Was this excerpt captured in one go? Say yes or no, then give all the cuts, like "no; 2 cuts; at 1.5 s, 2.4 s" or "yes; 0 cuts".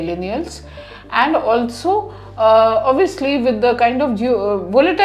yes; 0 cuts